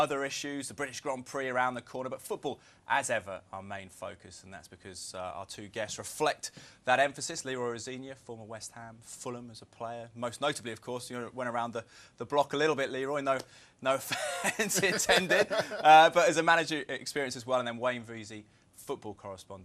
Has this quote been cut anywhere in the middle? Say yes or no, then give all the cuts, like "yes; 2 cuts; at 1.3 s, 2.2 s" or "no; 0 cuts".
yes; 1 cut; at 11.4 s